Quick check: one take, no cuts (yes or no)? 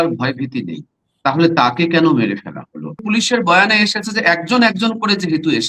no